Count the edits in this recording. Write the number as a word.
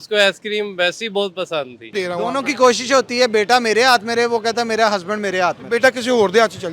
one